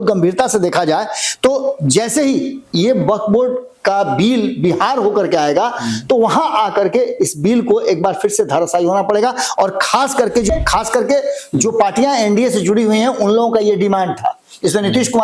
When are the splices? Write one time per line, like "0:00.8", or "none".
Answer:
0:10.5